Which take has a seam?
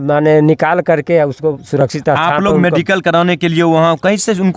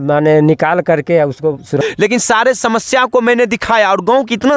second; 1 cut; at 1.8 s

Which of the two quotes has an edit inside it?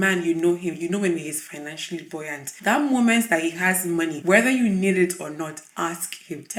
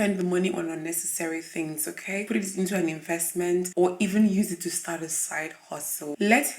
second; 1 cut; at 2.2 s

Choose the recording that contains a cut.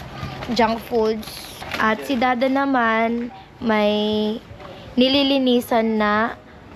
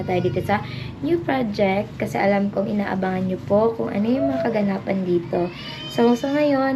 first; 1 cut; at 1.7 s

